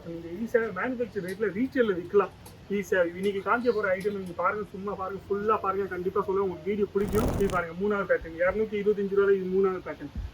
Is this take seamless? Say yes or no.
no